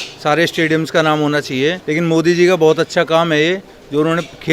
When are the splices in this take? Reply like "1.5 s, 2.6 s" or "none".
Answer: 1.8 s

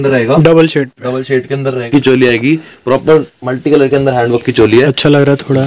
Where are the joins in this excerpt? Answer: 1.9 s

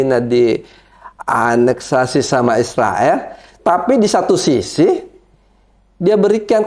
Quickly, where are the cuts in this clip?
3.6 s

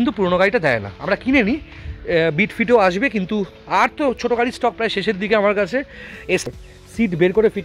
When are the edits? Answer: 6.5 s

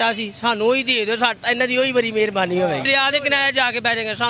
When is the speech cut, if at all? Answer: 2.8 s

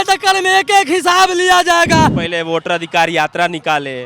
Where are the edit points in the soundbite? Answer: 2.2 s

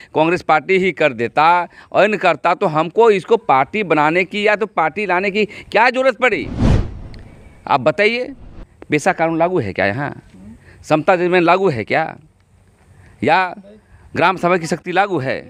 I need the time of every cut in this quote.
none

